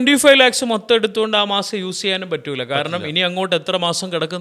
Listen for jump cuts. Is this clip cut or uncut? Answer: uncut